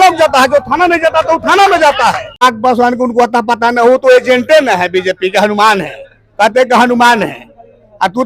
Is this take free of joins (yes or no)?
no